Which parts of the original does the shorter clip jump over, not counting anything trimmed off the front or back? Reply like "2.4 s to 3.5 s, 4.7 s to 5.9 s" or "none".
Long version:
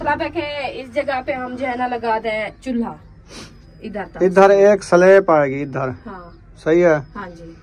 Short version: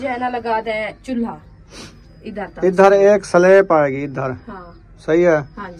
none